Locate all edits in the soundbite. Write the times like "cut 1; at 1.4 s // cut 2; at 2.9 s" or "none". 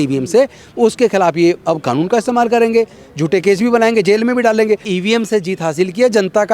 cut 1; at 4.9 s